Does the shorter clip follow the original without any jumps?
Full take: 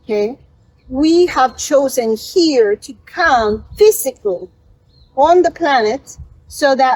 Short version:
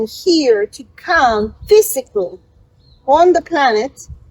yes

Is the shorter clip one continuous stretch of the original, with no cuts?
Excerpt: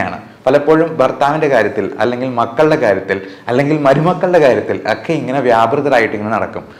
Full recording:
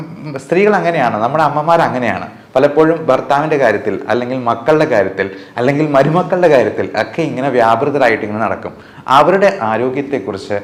yes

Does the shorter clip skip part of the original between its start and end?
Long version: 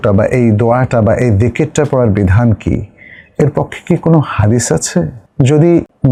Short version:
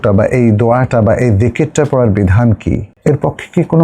yes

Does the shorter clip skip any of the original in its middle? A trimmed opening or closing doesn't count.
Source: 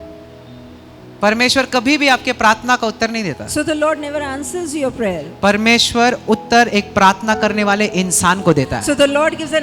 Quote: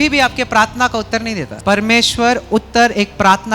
yes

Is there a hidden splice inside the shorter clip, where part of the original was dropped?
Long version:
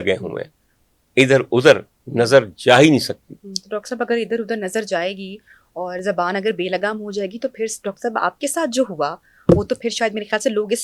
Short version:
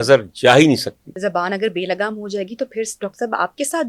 yes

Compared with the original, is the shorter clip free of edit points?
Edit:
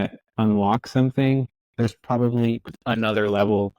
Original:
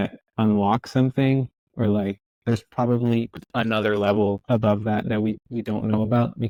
no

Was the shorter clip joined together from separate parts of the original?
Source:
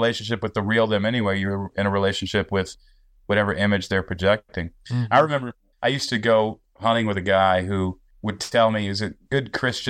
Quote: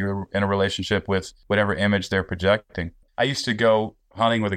yes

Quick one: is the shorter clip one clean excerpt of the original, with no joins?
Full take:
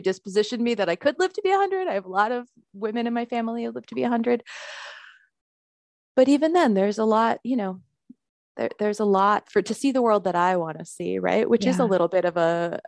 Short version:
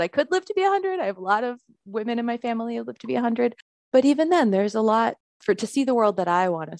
no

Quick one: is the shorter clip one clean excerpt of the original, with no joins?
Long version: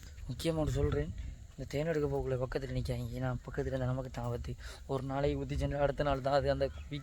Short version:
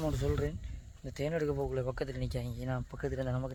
yes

